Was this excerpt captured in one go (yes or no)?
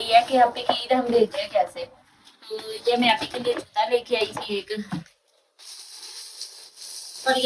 yes